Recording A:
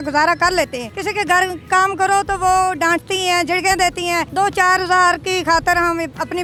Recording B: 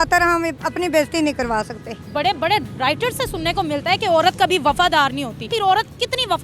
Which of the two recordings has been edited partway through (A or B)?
B